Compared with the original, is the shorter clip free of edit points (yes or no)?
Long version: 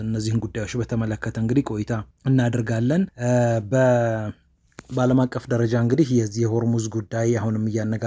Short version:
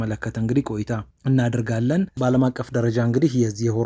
no